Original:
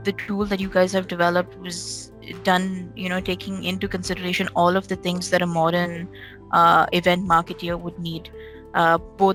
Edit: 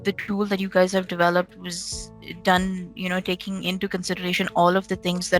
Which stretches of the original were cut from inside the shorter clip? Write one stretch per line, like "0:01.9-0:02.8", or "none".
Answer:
none